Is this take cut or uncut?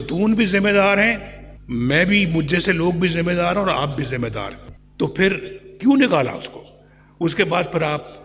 cut